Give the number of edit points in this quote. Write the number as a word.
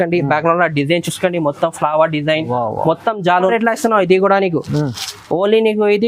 one